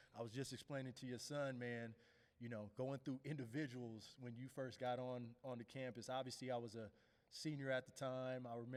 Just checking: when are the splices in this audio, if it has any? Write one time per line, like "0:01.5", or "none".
none

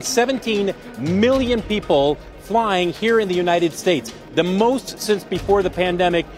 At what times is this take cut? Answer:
none

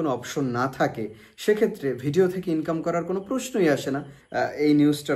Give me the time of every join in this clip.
0:04.2

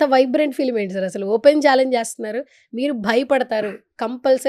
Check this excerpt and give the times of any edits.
none

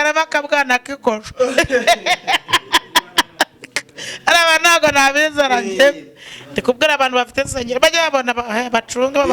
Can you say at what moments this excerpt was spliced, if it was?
none

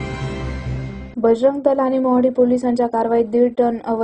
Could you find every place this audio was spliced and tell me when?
0:00.9

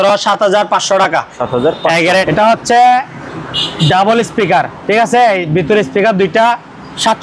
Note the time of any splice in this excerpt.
0:02.3

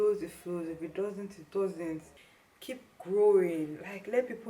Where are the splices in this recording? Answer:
0:02.1

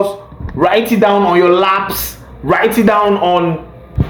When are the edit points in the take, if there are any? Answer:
none

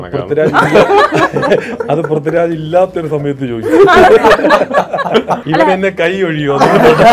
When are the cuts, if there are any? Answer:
0:05.4

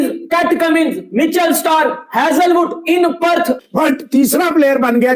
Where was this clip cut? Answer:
0:03.6

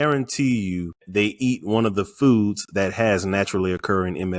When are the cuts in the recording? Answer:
0:01.0

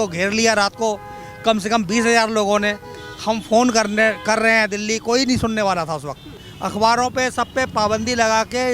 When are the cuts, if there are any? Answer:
0:06.3

